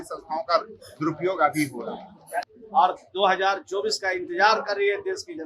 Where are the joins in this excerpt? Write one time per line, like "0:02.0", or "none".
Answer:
0:02.5

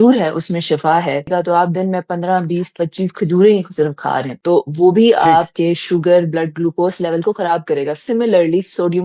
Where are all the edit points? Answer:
0:01.3

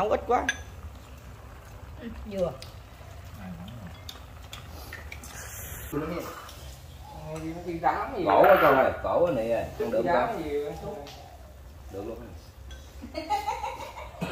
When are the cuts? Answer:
0:05.9

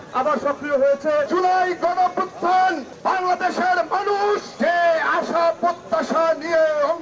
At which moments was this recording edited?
0:01.3

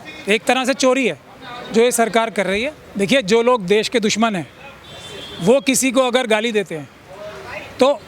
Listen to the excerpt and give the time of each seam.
0:02.8

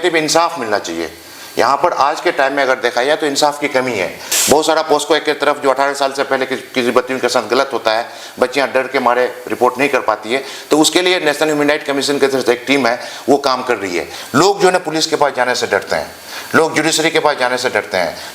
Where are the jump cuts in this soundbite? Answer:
0:04.3
0:14.1

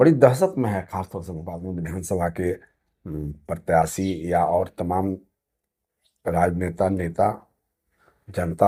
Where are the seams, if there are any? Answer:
none

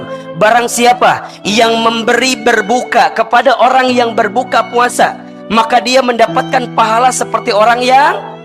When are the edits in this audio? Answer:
none

